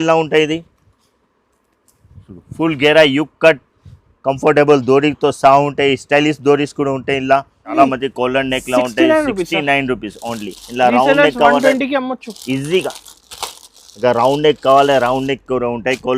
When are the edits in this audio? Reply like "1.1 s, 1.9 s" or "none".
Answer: 7.7 s